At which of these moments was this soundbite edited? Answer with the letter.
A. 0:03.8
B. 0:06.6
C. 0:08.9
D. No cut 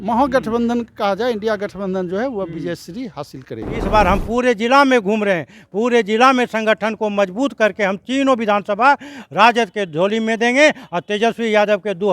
A